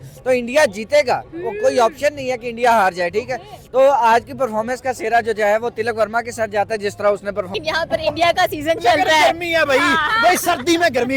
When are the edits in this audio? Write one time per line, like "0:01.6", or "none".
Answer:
0:07.5

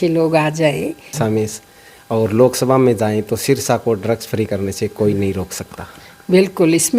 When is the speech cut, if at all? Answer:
0:01.1

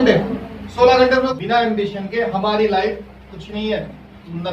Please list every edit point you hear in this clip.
0:01.3

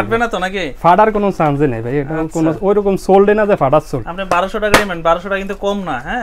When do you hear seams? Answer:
none

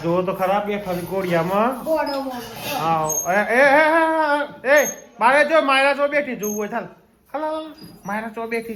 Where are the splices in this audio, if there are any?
none

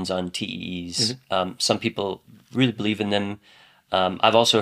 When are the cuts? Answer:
none

